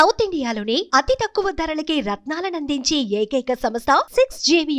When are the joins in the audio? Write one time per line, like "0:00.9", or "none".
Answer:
none